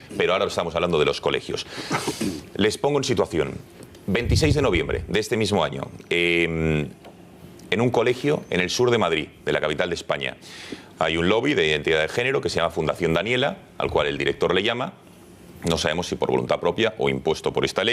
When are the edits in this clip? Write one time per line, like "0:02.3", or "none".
0:17.0